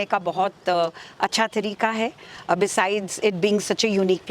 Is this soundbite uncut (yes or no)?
yes